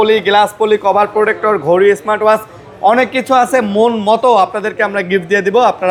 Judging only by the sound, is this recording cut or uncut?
uncut